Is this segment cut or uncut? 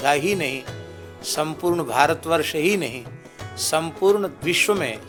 uncut